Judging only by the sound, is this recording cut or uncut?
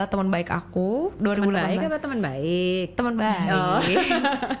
cut